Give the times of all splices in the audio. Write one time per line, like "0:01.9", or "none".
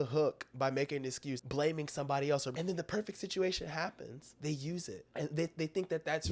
0:01.3
0:02.5
0:04.2
0:05.0